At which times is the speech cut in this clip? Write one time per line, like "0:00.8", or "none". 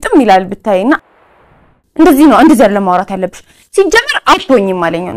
0:01.5